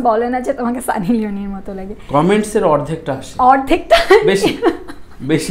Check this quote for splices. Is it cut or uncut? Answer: uncut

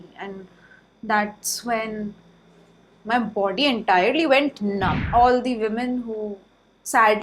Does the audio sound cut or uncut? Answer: cut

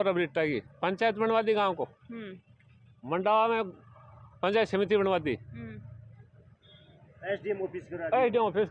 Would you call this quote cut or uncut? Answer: uncut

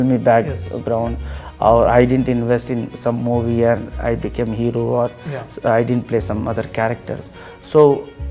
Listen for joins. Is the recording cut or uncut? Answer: uncut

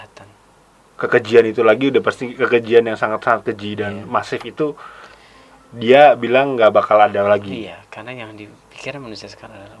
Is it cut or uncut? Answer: uncut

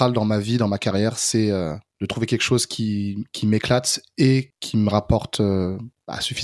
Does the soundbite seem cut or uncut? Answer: uncut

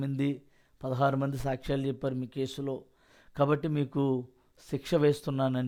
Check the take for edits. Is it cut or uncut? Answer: uncut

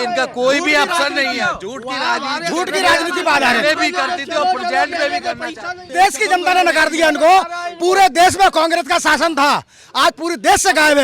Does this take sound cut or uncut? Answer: cut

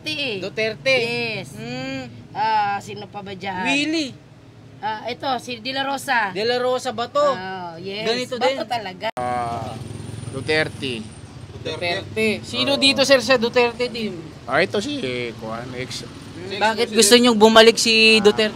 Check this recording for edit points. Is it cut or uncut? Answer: cut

